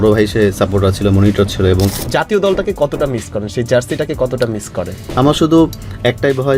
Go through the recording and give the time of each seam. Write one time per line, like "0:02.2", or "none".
0:02.0
0:05.0